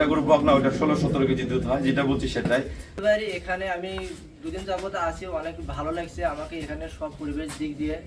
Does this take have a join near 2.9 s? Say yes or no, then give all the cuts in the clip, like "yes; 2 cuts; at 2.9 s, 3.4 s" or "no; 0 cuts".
yes; 1 cut; at 2.9 s